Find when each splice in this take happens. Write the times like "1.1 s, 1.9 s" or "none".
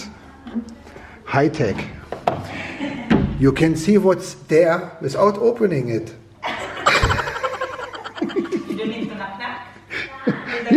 none